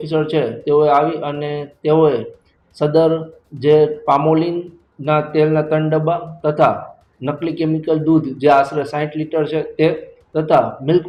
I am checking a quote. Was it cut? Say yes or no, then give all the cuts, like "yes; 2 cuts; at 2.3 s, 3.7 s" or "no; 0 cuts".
no; 0 cuts